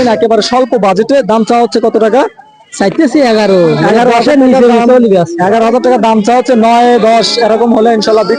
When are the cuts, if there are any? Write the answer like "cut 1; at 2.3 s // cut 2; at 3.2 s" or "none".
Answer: none

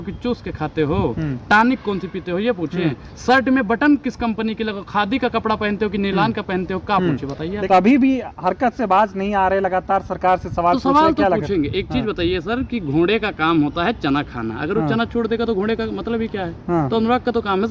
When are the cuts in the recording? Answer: cut 1; at 7.5 s

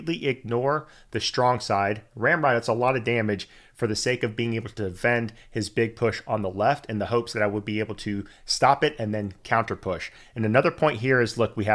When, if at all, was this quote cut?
none

